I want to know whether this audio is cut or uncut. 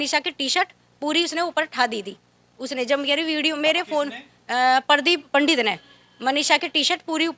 uncut